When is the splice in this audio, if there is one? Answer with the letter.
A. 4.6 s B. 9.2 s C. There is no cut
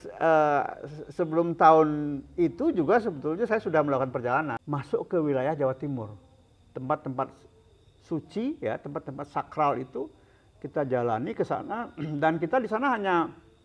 A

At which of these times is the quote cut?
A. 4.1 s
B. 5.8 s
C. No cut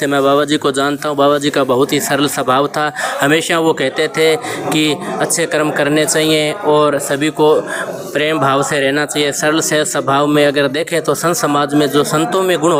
C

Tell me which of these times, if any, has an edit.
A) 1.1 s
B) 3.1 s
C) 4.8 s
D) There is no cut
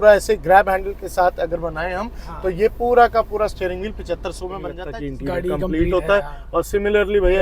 C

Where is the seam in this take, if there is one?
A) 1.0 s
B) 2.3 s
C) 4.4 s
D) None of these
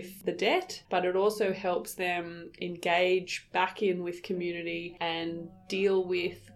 D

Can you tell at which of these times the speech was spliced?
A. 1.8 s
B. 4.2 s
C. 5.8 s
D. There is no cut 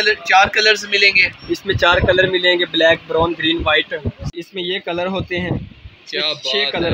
B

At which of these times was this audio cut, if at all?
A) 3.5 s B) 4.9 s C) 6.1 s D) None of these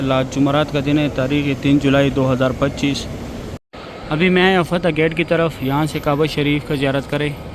A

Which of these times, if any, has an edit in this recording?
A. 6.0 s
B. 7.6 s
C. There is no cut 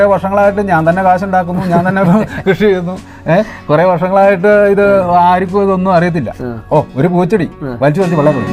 C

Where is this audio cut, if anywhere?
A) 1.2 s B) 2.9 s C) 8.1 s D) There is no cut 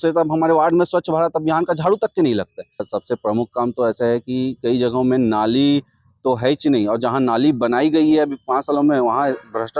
B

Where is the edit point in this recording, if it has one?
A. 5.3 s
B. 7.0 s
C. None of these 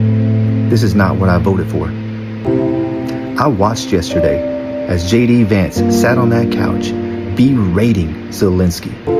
C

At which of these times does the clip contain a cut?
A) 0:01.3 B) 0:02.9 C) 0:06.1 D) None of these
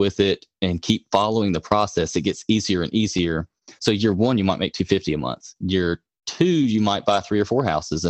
D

